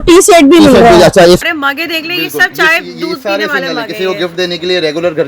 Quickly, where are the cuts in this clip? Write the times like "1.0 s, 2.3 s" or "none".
1.4 s